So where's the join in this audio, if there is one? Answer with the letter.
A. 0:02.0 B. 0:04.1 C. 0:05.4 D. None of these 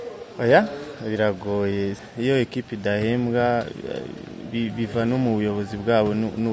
A